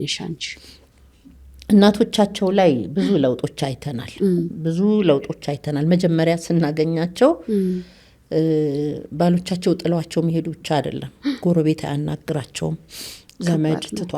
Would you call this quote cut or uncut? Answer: uncut